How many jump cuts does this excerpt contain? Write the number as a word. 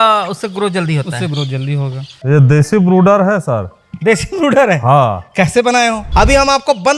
two